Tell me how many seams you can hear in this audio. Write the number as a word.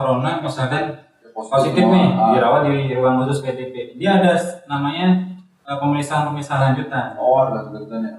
zero